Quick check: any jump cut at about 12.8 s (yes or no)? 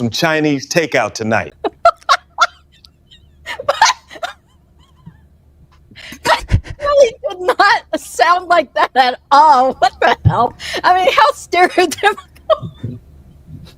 no